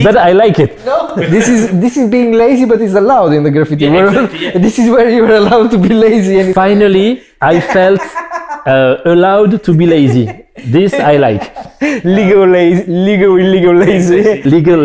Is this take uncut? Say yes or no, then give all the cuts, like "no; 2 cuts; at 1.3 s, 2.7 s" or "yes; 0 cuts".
yes; 0 cuts